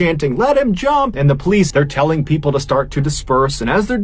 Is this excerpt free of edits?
no; 1 cut; at 1.1 s

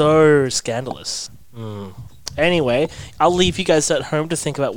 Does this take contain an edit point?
yes; 1 cut; at 1.2 s

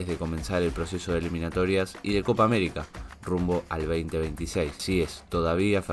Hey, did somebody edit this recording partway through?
yes; 1 cut; at 4.8 s

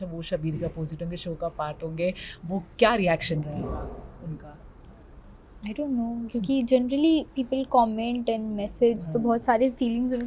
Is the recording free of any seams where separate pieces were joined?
yes; 0 cuts

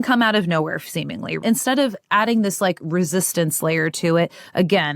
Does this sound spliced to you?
yes; 1 cut; at 1.4 s

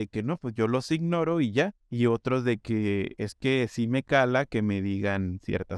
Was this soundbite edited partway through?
no; 0 cuts

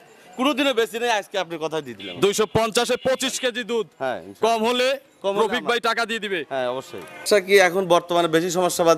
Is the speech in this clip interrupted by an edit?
yes; 1 cut; at 7.2 s

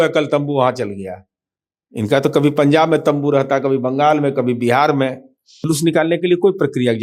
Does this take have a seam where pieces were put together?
yes; 1 cut; at 5.7 s

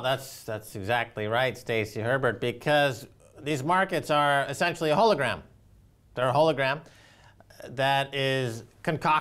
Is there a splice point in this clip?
yes; 1 cut; at 8.0 s

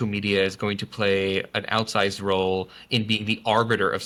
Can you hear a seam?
no; 0 cuts

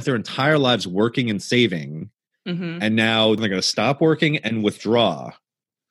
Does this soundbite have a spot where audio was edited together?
yes; 1 cut; at 3.4 s

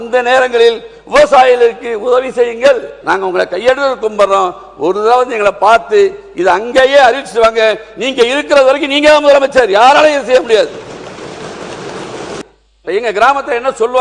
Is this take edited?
yes; 2 cuts; at 2.9 s, 12.4 s

